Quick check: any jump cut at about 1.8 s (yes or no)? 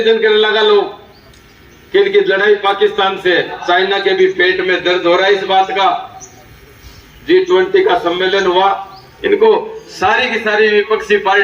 no